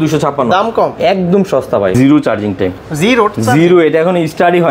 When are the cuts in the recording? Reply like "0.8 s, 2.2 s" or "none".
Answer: 1.0 s, 1.9 s